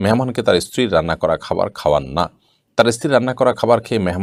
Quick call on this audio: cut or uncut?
uncut